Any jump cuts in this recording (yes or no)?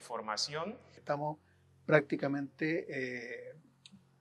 yes